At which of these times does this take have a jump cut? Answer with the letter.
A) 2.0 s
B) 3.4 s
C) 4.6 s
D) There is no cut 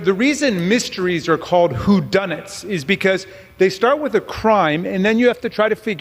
D